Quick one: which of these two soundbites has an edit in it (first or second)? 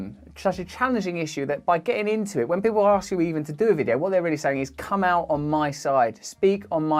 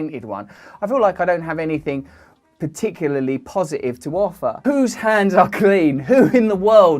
second